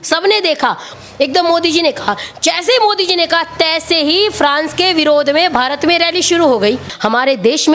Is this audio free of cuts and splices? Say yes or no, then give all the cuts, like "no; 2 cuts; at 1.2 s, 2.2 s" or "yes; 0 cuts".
no; 2 cuts; at 0.9 s, 6.9 s